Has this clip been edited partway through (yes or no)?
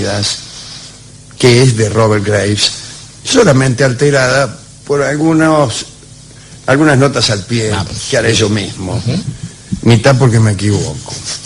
yes